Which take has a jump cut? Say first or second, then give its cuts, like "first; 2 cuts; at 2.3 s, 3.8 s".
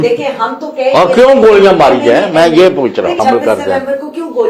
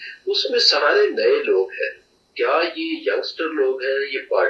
first; 1 cut; at 3.2 s